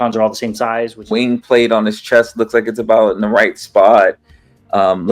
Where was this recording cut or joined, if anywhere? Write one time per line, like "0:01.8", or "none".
0:00.9

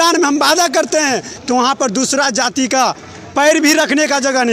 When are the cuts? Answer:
0:01.3

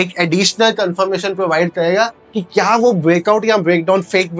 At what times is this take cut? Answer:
none

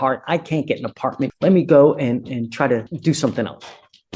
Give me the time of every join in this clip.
0:01.3
0:02.9

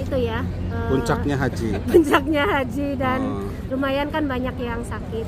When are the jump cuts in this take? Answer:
none

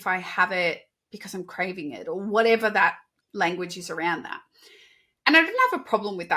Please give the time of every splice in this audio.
0:03.1

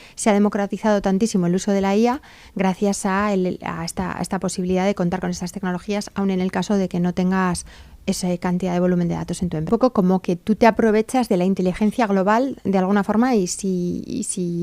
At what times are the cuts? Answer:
0:09.7

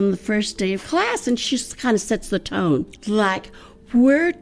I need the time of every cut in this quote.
0:01.4
0:02.9

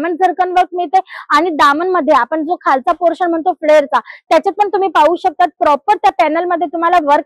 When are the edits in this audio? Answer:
none

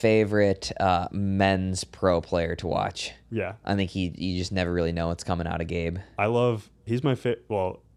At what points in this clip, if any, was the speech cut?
none

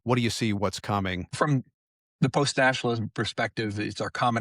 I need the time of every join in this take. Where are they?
0:01.3

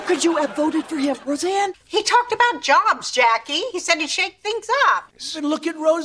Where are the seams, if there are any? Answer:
0:01.8
0:05.1

